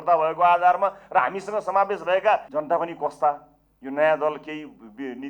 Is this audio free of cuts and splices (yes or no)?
no